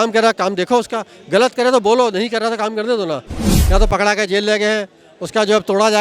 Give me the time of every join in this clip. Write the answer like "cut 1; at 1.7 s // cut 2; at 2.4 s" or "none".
cut 1; at 3.5 s